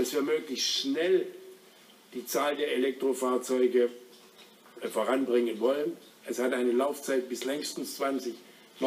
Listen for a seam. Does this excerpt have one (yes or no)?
yes